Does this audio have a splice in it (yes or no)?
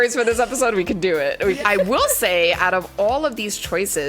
yes